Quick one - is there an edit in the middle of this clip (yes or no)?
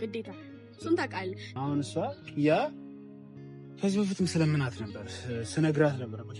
yes